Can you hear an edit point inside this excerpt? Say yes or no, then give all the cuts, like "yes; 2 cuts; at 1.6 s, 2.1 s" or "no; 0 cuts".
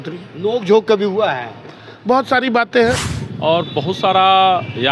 yes; 1 cut; at 3.0 s